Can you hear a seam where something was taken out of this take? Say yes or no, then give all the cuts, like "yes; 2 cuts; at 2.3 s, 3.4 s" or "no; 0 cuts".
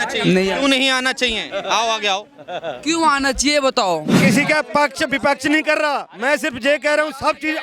yes; 1 cut; at 4.2 s